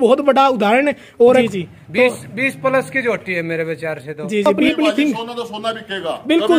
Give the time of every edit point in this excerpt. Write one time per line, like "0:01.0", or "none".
0:01.4
0:04.5